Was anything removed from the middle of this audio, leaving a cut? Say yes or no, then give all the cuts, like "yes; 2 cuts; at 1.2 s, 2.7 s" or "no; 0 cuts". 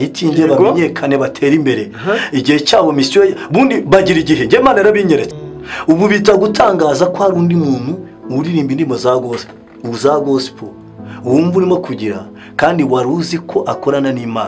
yes; 1 cut; at 5.4 s